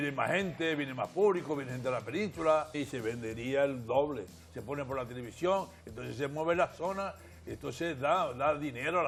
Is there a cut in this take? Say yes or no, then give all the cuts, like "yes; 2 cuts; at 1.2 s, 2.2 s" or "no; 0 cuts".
no; 0 cuts